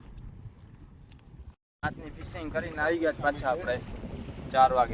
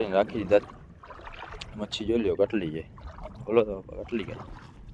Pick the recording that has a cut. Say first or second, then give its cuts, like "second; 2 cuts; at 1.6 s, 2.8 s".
first; 1 cut; at 1.6 s